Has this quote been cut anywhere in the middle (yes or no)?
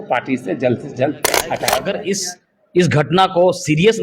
yes